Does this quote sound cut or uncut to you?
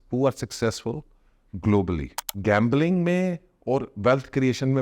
cut